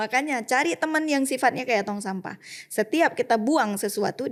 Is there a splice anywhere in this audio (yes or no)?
no